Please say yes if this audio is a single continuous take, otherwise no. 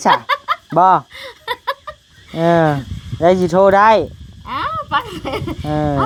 yes